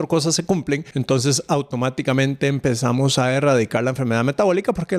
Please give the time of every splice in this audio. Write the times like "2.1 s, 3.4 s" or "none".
0.9 s